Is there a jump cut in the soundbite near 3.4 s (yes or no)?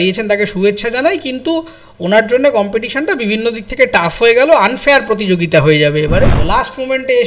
no